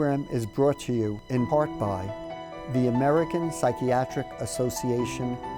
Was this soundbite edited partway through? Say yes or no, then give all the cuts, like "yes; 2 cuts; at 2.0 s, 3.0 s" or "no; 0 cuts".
yes; 1 cut; at 2.1 s